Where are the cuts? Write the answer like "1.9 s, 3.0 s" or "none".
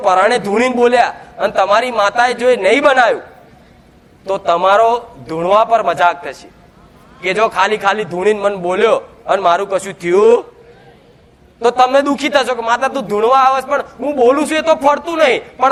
none

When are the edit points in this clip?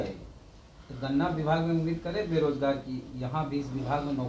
none

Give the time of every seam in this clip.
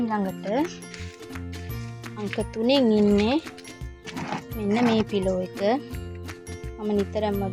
0.7 s, 2.1 s

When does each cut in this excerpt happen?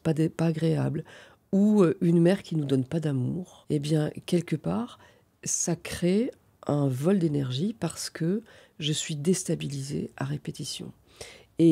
3.5 s

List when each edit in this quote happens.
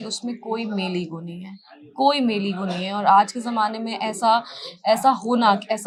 none

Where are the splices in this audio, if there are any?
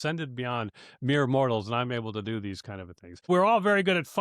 3.3 s

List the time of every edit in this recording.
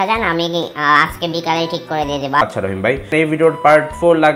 3.1 s

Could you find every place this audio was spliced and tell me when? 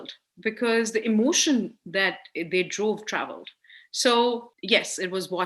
4.5 s

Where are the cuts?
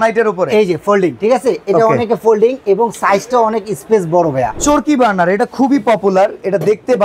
1.2 s, 4.6 s

